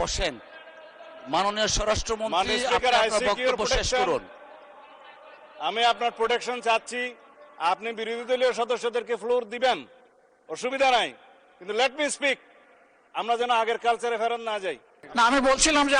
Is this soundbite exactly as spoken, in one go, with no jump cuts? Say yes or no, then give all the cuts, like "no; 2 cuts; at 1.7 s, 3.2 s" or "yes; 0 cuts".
no; 1 cut; at 14.9 s